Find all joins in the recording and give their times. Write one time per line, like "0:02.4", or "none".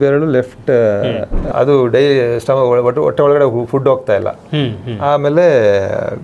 0:01.5